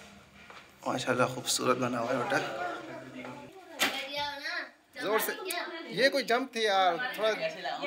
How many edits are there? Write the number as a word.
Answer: one